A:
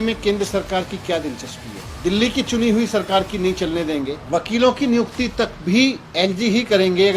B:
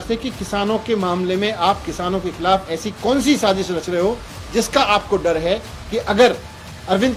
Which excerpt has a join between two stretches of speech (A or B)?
A